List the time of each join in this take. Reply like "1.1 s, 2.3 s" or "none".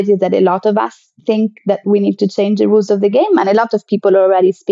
none